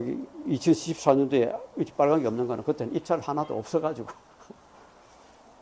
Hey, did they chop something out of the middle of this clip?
yes; 1 cut; at 3.5 s

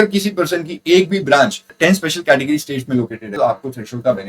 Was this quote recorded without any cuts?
no; 2 cuts; at 1.7 s, 3.2 s

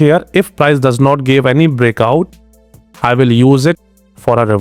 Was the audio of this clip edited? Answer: no; 0 cuts

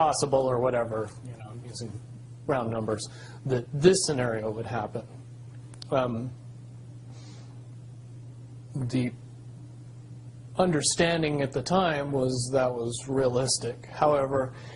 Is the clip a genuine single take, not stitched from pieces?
yes; 0 cuts

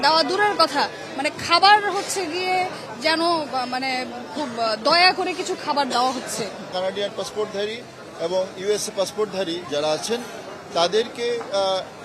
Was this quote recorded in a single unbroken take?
no; 1 cut; at 6.7 s

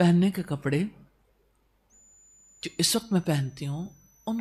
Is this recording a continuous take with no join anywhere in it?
yes; 0 cuts

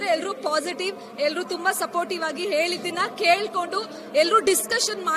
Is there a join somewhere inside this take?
no; 0 cuts

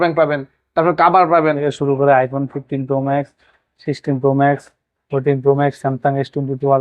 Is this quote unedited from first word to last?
no; 1 cut; at 1.4 s

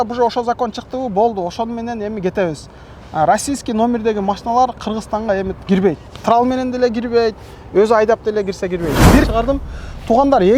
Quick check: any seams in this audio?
yes; 1 cut; at 9.2 s

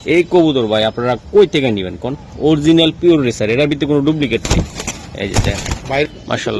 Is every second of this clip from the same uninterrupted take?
yes; 0 cuts

